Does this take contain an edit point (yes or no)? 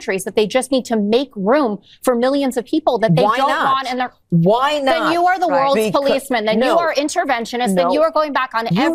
no